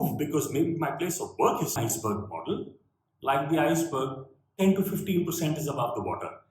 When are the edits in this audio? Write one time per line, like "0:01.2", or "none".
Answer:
0:01.8